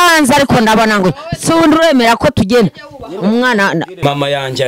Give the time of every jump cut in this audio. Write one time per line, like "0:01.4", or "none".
none